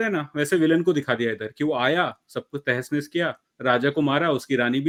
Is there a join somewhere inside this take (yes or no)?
no